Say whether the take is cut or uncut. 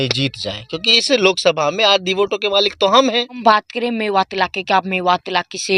cut